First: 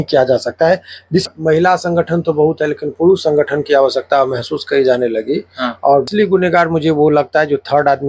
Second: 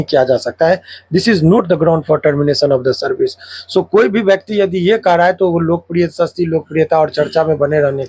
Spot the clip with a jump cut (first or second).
first